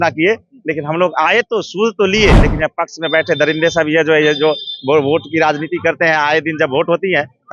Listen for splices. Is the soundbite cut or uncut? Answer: cut